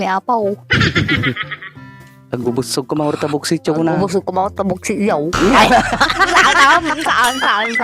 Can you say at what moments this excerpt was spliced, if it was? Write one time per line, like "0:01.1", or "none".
0:05.3